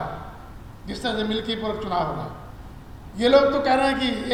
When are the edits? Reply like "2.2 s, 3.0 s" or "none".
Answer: none